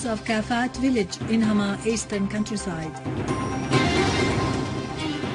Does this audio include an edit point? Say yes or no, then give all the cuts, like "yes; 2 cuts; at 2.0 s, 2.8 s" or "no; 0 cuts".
yes; 1 cut; at 1.1 s